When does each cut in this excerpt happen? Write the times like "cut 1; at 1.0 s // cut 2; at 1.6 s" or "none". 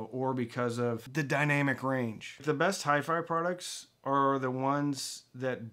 cut 1; at 1.0 s // cut 2; at 2.4 s